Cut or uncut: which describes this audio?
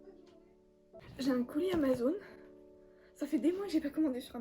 cut